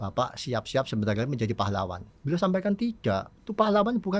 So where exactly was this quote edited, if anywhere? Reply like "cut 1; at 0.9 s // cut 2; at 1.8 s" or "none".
cut 1; at 2.1 s // cut 2; at 3.4 s